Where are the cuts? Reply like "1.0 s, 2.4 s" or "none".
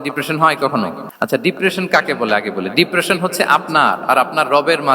1.0 s